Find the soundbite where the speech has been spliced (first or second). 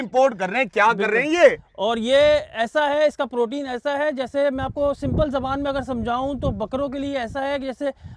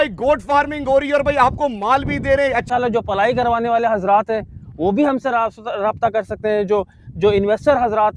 second